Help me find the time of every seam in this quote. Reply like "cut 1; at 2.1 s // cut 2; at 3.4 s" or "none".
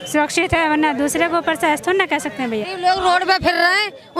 cut 1; at 2.7 s